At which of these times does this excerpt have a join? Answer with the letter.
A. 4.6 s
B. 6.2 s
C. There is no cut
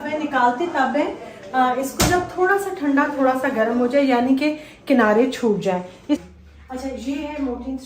B